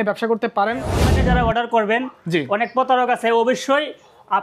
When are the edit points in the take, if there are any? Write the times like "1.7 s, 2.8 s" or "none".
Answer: 1.2 s